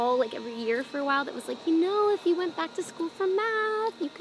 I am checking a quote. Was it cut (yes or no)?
no